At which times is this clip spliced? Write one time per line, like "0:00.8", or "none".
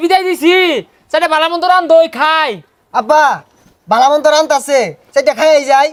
none